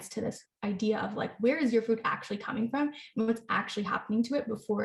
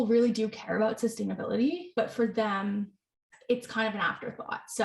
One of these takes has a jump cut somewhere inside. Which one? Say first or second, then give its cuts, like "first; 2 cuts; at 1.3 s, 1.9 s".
second; 1 cut; at 1.8 s